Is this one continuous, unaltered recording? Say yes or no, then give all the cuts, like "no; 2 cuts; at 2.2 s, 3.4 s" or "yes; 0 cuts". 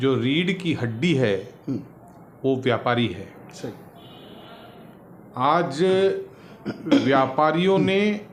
yes; 0 cuts